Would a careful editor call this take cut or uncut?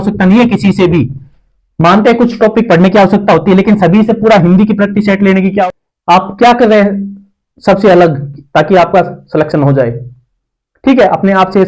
cut